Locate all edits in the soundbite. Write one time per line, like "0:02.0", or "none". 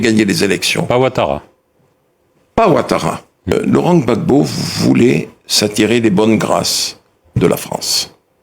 0:03.5